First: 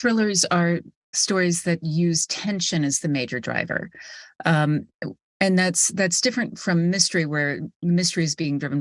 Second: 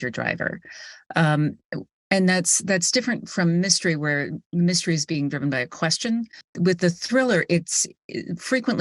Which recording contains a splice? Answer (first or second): second